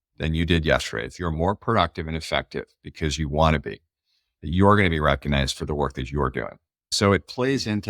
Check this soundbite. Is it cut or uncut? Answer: cut